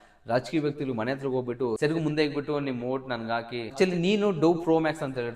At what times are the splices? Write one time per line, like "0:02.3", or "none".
0:01.8
0:03.6